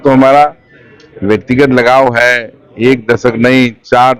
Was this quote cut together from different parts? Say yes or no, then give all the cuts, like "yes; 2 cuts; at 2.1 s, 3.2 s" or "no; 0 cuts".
no; 0 cuts